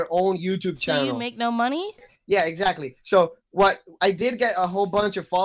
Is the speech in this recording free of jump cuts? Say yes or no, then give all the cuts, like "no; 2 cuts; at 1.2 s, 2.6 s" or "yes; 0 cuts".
no; 1 cut; at 2.1 s